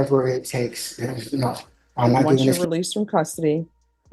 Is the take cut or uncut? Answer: cut